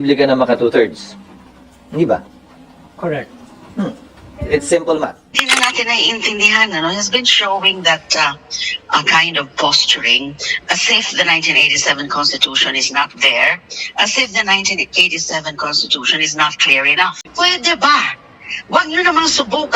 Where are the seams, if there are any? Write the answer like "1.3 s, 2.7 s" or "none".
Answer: 5.2 s